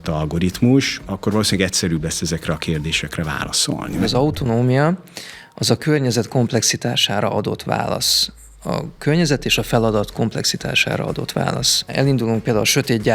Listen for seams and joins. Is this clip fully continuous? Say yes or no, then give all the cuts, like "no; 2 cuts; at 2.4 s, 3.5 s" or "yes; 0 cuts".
no; 3 cuts; at 1.1 s, 4.0 s, 11.9 s